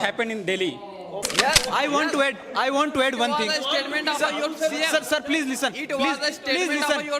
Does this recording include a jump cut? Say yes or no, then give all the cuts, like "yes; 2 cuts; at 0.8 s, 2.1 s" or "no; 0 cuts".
yes; 1 cut; at 1.3 s